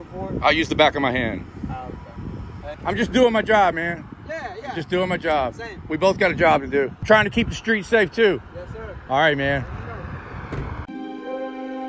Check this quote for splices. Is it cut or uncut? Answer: cut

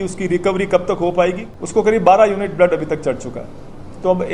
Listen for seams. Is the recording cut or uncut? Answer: cut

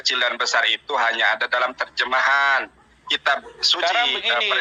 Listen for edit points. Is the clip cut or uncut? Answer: uncut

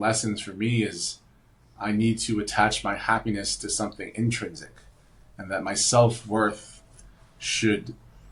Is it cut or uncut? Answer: uncut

